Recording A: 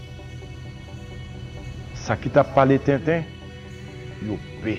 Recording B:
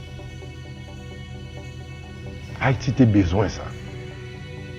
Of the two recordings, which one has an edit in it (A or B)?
B